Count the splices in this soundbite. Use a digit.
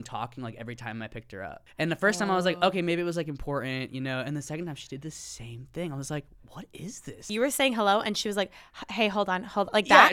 2